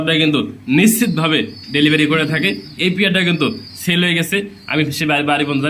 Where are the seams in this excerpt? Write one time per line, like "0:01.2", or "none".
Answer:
none